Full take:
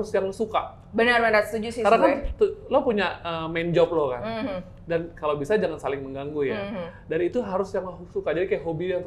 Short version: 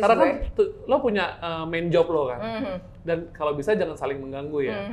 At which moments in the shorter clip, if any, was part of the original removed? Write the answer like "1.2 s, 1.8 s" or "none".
none